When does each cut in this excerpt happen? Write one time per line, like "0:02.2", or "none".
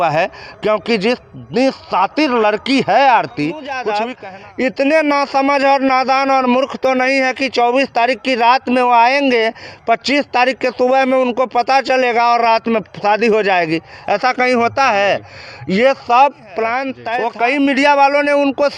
0:03.9
0:16.9